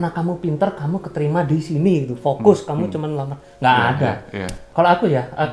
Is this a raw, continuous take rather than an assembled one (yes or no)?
yes